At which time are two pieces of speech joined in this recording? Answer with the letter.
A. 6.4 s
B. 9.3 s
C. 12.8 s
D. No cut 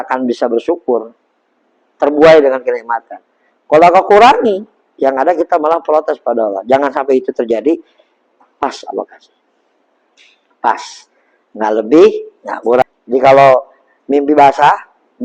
C